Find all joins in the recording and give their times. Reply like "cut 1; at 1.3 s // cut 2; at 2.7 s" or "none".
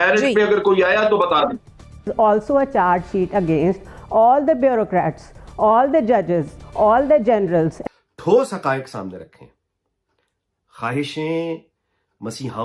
cut 1; at 2.1 s // cut 2; at 7.8 s